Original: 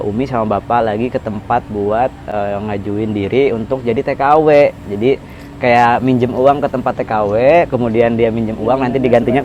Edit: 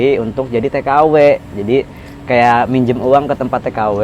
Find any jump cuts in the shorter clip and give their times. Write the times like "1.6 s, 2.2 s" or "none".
none